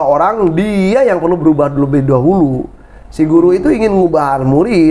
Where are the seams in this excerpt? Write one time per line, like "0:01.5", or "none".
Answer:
none